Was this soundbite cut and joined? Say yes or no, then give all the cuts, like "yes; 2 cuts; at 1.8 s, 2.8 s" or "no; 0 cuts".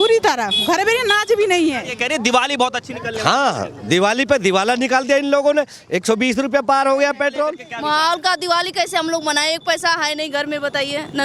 yes; 2 cuts; at 1.9 s, 7.7 s